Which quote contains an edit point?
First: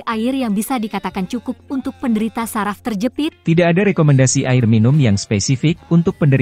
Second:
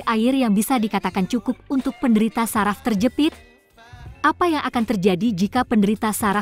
second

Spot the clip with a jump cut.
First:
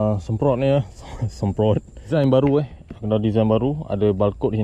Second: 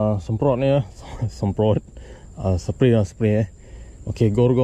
first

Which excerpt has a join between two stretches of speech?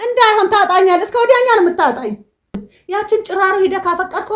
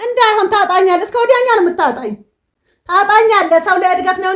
first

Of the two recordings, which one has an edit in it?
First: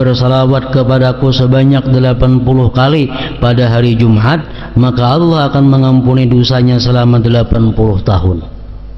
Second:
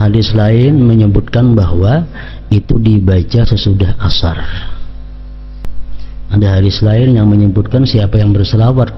second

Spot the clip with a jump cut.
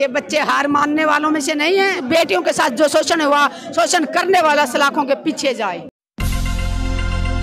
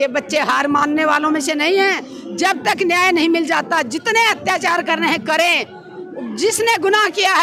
first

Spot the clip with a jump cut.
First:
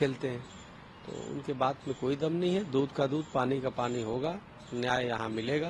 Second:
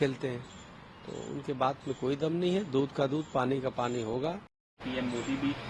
first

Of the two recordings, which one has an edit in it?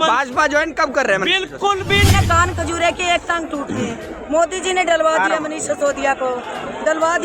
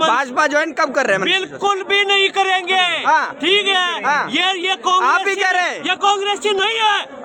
first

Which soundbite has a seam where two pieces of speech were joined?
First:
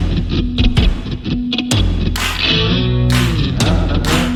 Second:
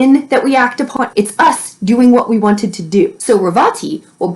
second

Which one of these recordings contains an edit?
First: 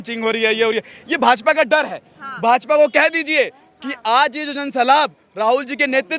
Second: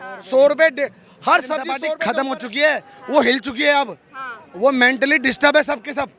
second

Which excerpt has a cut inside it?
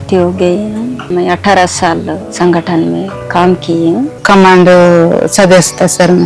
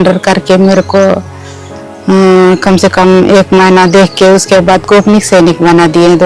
first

